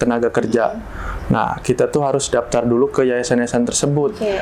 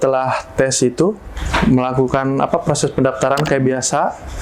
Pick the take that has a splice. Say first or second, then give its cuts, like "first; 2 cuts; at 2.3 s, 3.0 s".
second; 1 cut; at 1.3 s